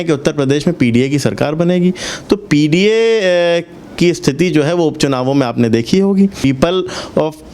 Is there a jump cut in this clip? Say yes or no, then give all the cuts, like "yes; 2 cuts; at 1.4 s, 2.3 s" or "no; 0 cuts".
yes; 1 cut; at 6.4 s